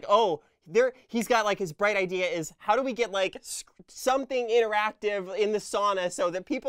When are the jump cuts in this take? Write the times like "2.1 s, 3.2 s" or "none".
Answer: none